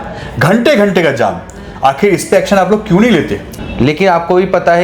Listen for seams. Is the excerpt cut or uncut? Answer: cut